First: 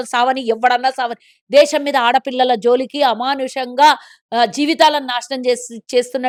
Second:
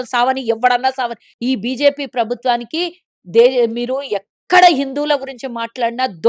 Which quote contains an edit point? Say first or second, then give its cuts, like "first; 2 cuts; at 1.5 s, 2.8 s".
second; 1 cut; at 1.2 s